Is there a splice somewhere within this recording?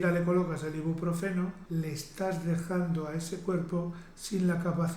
yes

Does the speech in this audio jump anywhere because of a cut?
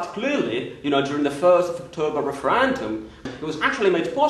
yes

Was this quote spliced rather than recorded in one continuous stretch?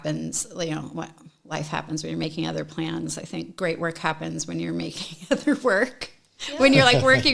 no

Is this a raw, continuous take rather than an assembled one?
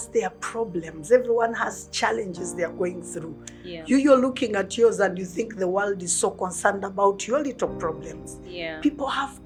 yes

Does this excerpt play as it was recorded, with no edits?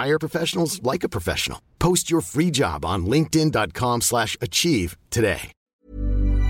no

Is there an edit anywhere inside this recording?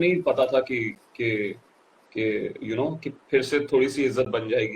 no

